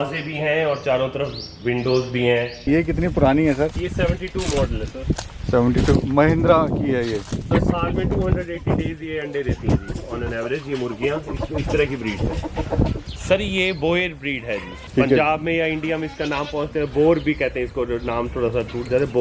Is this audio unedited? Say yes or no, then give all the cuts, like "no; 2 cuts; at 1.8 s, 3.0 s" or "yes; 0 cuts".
no; 3 cuts; at 2.7 s, 7.5 s, 13.0 s